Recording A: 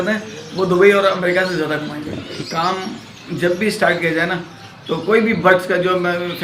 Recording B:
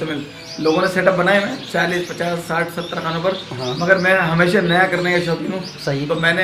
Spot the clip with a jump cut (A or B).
A